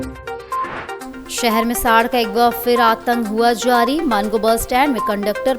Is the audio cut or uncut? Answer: cut